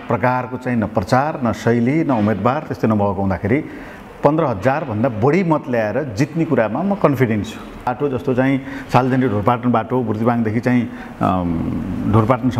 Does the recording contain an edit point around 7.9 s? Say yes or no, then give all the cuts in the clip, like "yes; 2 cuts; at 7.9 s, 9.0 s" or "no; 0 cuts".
yes; 1 cut; at 7.9 s